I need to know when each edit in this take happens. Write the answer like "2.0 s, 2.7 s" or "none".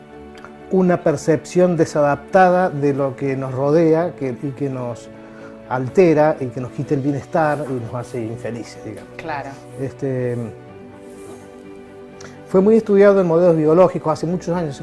none